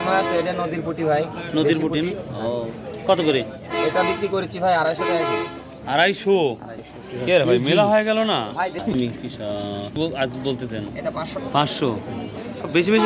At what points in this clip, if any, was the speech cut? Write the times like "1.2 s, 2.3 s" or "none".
8.9 s